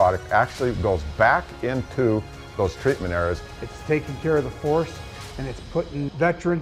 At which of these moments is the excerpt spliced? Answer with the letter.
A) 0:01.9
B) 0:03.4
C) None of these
B